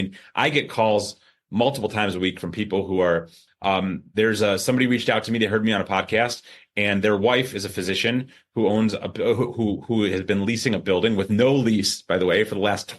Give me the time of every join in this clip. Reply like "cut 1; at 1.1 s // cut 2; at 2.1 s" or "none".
cut 1; at 3.5 s